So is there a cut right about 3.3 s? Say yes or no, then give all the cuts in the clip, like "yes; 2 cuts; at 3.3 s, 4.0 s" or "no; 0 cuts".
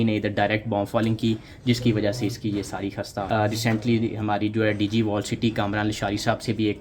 yes; 1 cut; at 3.3 s